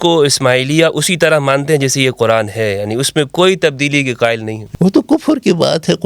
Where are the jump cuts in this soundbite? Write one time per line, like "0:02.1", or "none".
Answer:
0:04.6

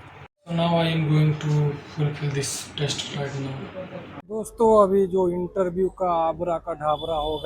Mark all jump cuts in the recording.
0:04.2

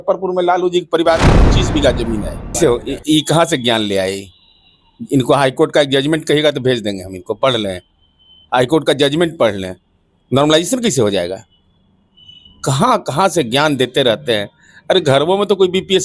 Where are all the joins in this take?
0:02.6

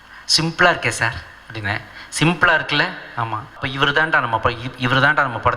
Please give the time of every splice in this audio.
0:03.7

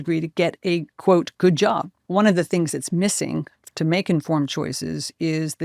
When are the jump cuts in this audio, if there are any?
0:01.9

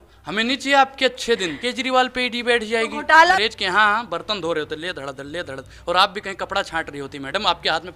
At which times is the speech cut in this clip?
0:01.6
0:03.3

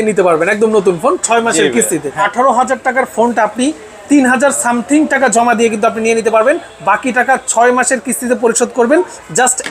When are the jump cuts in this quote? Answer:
0:02.2

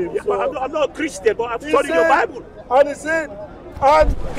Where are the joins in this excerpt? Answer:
none

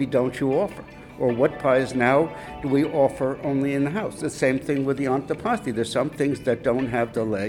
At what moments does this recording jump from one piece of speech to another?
none

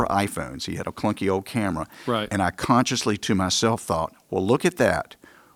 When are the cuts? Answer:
none

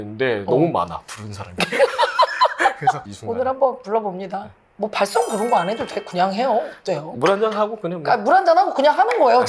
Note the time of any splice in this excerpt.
0:03.0

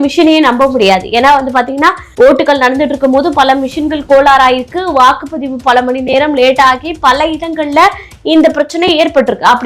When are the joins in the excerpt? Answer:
0:02.0

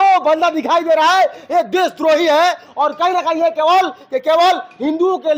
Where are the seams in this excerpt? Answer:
none

